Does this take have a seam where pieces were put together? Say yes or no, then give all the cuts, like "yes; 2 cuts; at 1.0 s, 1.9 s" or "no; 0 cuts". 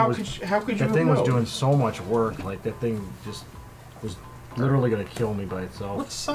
no; 0 cuts